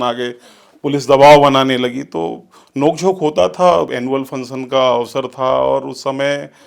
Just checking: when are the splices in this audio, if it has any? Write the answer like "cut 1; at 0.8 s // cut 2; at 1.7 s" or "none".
cut 1; at 3.9 s